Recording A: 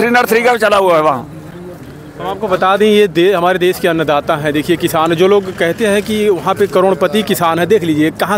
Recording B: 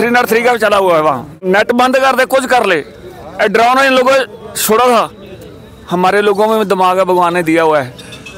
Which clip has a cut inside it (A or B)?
B